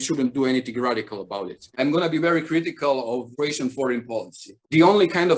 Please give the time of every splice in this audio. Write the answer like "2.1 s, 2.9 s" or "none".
1.7 s, 4.5 s